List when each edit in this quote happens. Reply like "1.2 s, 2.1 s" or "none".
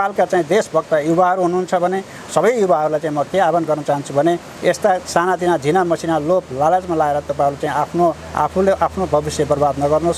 none